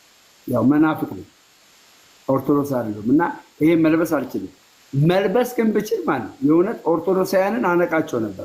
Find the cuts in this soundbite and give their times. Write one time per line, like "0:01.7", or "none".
none